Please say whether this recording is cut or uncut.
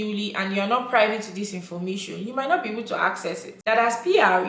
cut